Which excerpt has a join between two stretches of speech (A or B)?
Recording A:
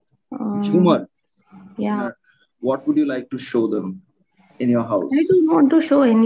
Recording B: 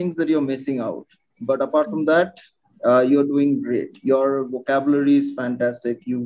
A